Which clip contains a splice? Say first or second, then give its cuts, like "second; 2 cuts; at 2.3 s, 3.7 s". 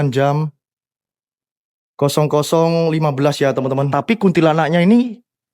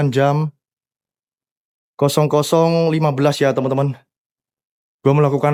first; 1 cut; at 3.9 s